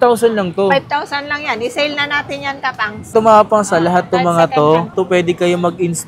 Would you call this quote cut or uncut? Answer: cut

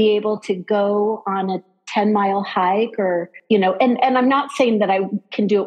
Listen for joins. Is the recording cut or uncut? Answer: cut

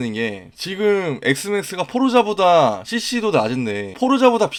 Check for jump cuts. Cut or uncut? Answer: uncut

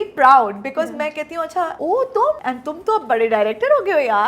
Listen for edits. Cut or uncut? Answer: cut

